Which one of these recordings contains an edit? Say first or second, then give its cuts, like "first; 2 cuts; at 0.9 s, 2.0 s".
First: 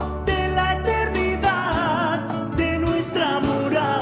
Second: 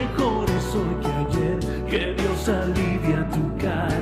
second; 1 cut; at 2.8 s